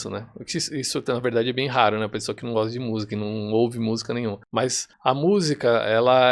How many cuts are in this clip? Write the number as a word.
one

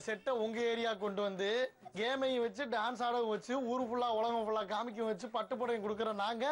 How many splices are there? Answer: one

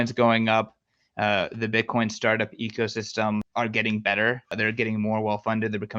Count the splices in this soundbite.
two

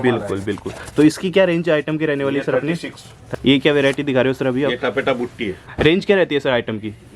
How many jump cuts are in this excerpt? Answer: two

